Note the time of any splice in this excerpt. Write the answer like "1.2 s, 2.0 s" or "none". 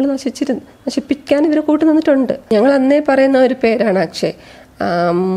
2.5 s